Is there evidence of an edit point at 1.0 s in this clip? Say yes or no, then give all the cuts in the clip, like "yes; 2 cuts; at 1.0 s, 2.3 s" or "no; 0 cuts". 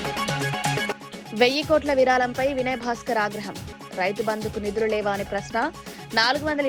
yes; 1 cut; at 1.0 s